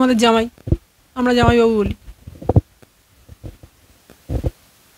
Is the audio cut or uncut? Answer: uncut